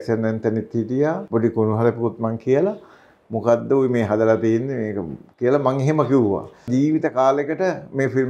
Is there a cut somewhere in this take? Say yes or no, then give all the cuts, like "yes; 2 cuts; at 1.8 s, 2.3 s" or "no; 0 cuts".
yes; 2 cuts; at 1.2 s, 6.7 s